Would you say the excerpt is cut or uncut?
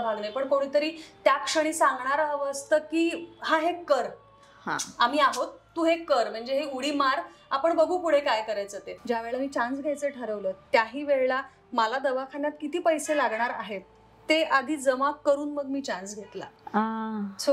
cut